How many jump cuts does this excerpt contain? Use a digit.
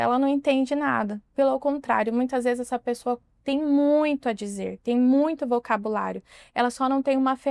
0